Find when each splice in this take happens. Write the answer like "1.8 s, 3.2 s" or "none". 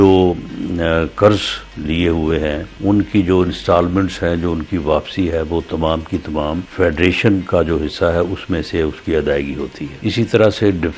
2.7 s, 6.7 s, 9.9 s

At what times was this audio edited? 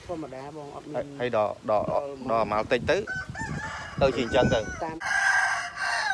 5.0 s

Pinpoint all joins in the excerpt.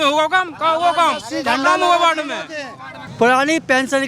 3.1 s

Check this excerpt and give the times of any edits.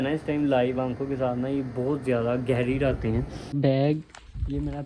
3.6 s

